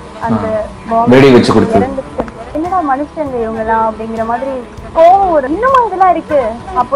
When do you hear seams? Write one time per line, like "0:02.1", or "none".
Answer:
0:02.5
0:05.5